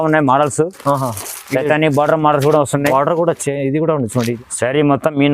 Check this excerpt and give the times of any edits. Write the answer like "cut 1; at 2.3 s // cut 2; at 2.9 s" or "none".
cut 1; at 4.4 s

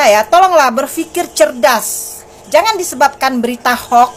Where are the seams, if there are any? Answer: none

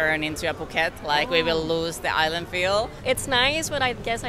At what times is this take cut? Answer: cut 1; at 3.0 s

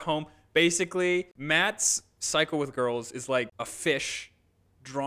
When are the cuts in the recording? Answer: cut 1; at 1.3 s // cut 2; at 3.5 s

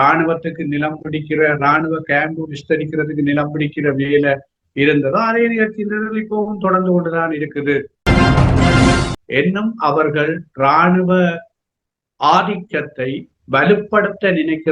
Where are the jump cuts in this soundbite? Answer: cut 1; at 7.9 s // cut 2; at 9.2 s

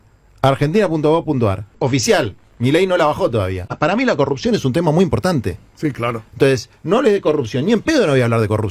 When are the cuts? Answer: cut 1; at 1.7 s // cut 2; at 3.7 s

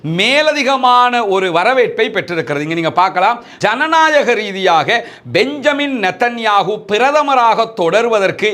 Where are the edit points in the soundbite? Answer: cut 1; at 3.5 s

